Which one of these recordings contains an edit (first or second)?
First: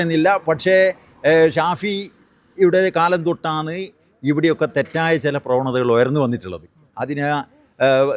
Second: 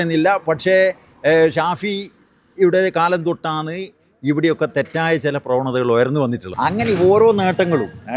second